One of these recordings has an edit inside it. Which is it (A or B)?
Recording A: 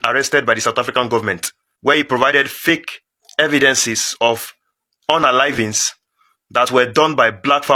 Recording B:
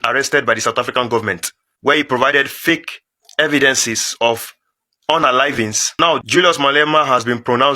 B